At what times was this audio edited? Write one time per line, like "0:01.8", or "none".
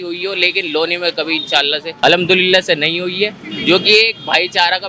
0:01.9